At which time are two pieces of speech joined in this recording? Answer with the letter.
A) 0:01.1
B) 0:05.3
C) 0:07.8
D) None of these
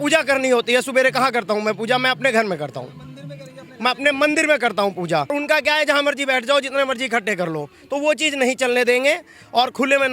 B